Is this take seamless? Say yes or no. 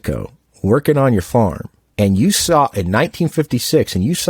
yes